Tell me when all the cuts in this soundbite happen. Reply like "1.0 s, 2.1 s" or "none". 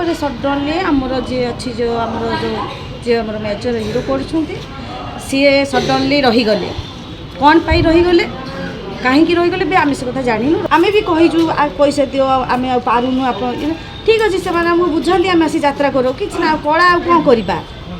10.6 s